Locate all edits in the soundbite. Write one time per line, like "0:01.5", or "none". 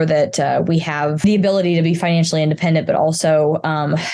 0:01.2

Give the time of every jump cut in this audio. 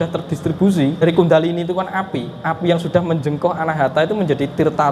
0:01.0

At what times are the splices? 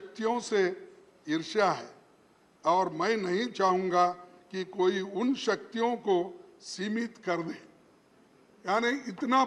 none

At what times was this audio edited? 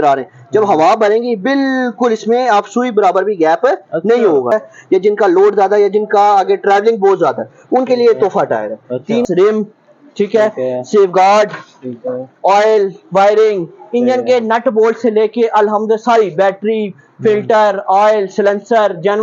0:04.5
0:09.2

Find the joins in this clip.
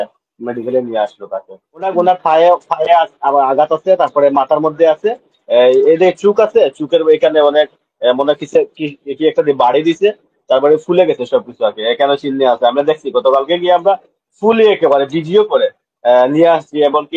0:01.9

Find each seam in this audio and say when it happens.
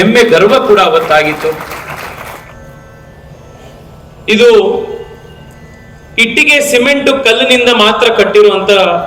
0:02.4

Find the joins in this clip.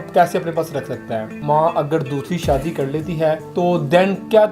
0:01.3
0:03.5

